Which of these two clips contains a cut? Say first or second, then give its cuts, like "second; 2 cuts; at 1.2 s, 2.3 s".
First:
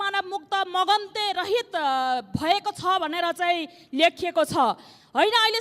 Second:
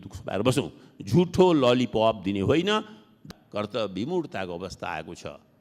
second; 1 cut; at 3.2 s